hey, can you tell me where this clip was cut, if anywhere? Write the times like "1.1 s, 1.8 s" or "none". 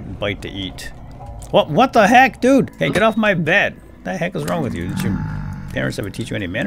2.7 s